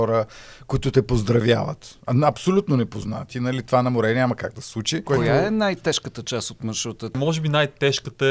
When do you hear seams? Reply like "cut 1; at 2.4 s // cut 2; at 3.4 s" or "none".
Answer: cut 1; at 5.1 s // cut 2; at 7.2 s